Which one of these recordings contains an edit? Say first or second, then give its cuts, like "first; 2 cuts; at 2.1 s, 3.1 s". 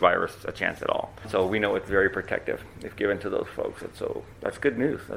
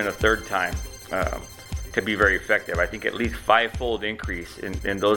first; 1 cut; at 1.2 s